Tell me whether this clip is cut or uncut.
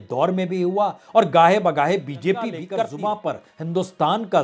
cut